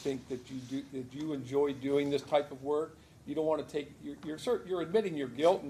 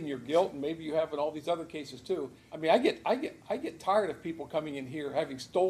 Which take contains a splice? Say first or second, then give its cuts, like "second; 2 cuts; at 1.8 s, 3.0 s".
second; 1 cut; at 2.4 s